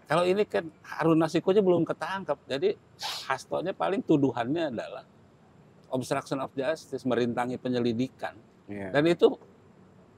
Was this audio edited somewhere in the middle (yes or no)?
no